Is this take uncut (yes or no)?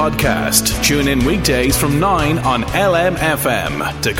yes